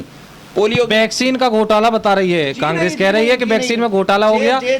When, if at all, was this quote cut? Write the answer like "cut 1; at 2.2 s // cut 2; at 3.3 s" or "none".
none